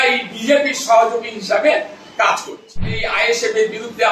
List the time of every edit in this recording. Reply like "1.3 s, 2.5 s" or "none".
3.0 s